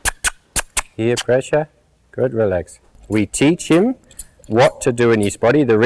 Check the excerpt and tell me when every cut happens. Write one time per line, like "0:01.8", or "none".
0:02.9